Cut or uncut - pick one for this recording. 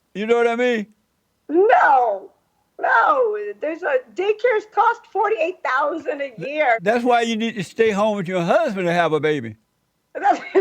cut